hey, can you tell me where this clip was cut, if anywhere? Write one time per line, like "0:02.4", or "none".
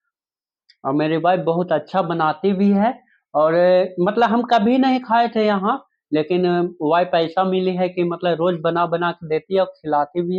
none